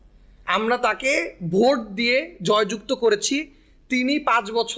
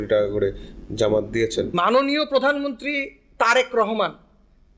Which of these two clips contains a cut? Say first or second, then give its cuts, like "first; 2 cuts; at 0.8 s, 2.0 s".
second; 1 cut; at 1.7 s